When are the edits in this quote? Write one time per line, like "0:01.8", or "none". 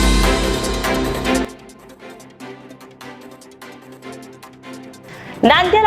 0:01.5
0:03.6
0:04.6